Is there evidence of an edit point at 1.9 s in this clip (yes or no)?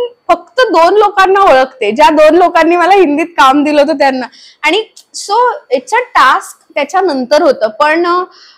no